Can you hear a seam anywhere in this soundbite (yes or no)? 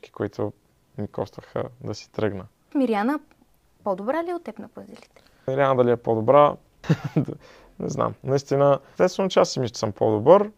yes